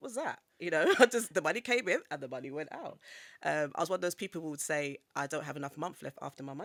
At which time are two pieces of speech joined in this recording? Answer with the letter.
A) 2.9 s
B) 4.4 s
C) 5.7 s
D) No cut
D